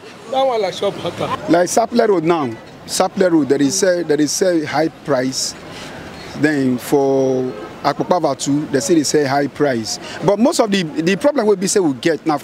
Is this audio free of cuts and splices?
no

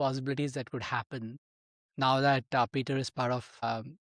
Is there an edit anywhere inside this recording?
no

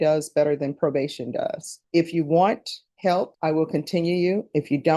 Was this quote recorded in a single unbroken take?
no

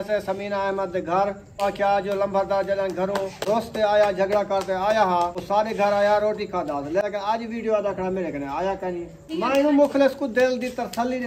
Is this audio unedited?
no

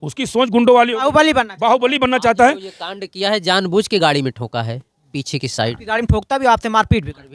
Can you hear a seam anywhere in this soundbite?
no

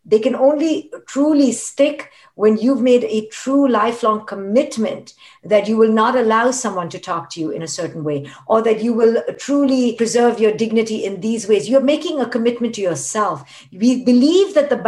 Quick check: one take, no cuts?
no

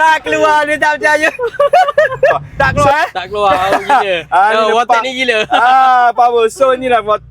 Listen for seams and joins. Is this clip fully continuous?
no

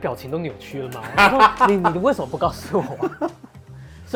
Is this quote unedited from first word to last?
yes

